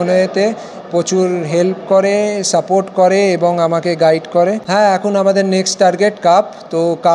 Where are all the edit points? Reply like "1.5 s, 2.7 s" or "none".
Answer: 4.6 s